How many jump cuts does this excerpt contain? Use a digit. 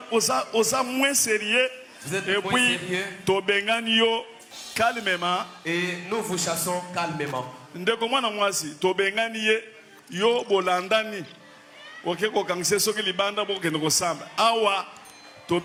0